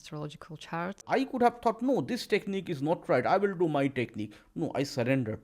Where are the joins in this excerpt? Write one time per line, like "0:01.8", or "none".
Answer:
0:01.0